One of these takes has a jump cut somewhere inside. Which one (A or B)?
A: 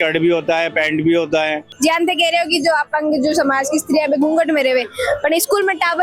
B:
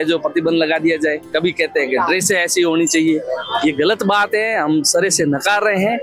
A